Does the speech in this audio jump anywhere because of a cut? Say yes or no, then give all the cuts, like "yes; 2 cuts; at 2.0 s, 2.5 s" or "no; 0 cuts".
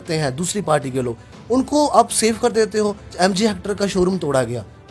yes; 1 cut; at 3.1 s